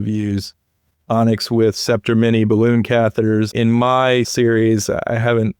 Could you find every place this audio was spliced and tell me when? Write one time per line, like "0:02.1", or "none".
0:03.5
0:04.3